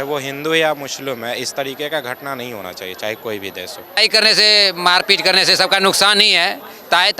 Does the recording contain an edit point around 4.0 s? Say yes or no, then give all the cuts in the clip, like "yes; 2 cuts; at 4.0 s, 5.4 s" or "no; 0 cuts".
yes; 1 cut; at 4.0 s